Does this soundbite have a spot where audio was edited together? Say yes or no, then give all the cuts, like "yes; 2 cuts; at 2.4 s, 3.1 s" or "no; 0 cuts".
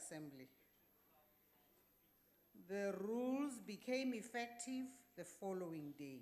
yes; 1 cut; at 3.6 s